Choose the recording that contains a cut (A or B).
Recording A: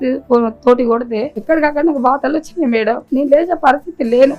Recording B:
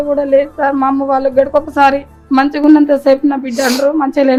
A